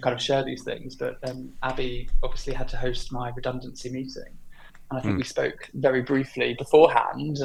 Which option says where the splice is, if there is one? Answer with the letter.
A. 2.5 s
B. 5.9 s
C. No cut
C